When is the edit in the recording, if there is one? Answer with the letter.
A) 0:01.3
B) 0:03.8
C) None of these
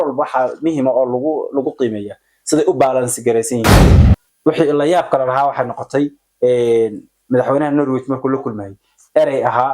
B